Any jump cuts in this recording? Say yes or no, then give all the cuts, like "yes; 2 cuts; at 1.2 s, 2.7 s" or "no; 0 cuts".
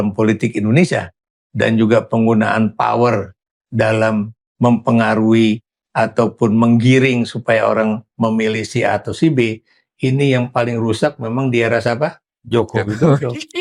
no; 0 cuts